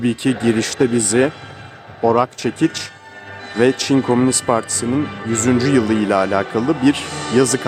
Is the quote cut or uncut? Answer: uncut